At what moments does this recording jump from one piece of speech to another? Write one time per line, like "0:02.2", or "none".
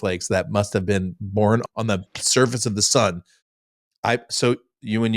0:01.6